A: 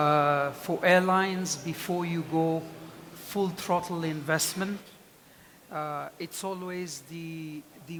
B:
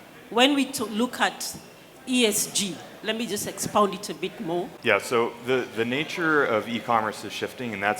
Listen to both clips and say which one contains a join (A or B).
B